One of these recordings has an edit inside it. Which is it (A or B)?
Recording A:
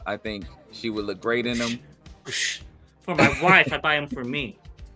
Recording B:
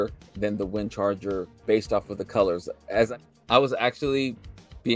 B